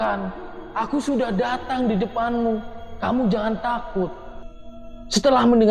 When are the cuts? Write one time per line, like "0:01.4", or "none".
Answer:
none

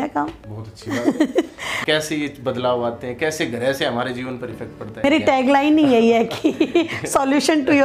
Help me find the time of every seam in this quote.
0:01.7
0:05.0

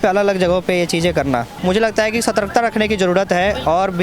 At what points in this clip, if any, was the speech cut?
0:01.5

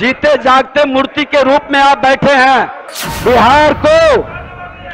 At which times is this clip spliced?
0:02.9

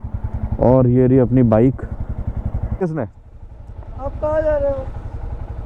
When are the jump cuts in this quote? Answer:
0:02.8

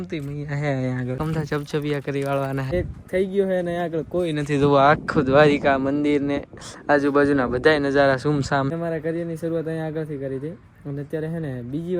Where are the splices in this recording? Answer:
0:01.2
0:02.7
0:08.7

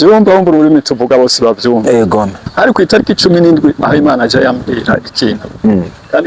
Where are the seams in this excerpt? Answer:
0:02.4

